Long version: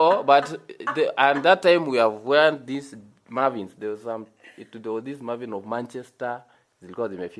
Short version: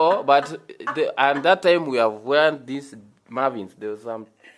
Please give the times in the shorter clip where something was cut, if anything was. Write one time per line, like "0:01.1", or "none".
none

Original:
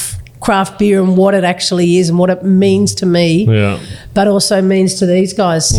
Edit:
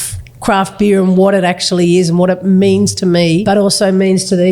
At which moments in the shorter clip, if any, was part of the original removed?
0:03.4

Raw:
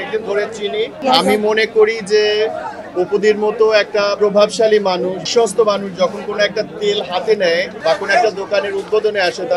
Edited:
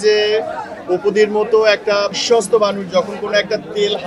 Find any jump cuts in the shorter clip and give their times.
0:02.1

